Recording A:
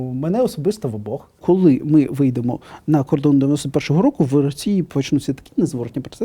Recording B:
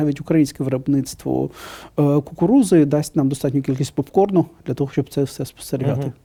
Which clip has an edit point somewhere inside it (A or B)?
A